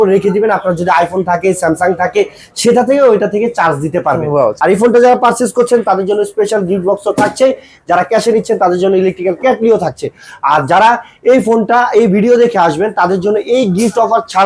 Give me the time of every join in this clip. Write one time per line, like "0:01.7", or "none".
0:04.5